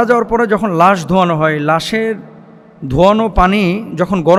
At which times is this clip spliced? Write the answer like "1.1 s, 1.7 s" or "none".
none